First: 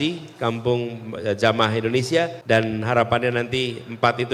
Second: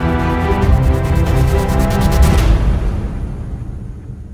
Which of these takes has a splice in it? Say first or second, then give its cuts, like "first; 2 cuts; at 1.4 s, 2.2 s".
first; 1 cut; at 2.4 s